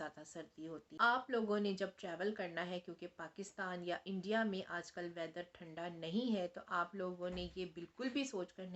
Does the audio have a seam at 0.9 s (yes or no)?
yes